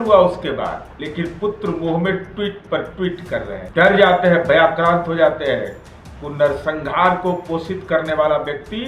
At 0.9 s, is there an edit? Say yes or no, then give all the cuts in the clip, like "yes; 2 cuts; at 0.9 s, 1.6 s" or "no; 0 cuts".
yes; 2 cuts; at 0.9 s, 3.6 s